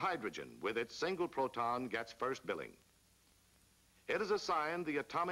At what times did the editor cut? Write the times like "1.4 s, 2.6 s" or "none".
2.2 s